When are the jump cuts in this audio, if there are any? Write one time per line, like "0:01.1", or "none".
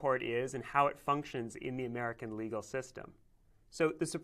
0:02.0